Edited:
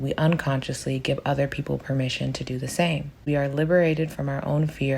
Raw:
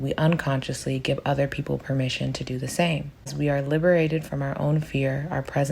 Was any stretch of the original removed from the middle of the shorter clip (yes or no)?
yes